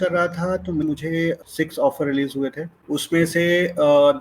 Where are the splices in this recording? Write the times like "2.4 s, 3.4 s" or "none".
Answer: 1.1 s, 2.7 s